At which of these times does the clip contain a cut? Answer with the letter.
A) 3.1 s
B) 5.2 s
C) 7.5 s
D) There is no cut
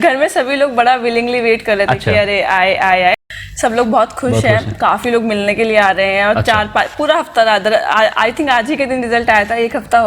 A